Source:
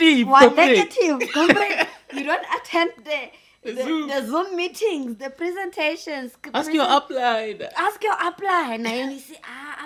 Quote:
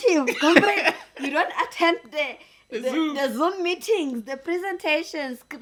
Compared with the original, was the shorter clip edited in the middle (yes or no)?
no